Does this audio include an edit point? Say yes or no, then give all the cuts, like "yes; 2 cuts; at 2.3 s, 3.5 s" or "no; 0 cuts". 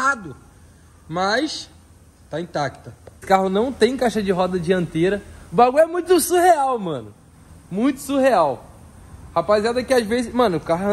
yes; 1 cut; at 3.2 s